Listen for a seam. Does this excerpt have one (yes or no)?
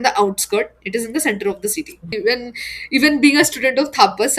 yes